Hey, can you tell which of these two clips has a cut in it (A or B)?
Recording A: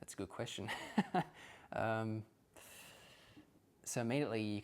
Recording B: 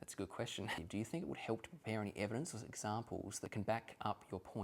B